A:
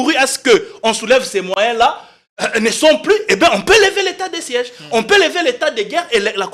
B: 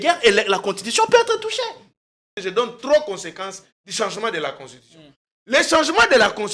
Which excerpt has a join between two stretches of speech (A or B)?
B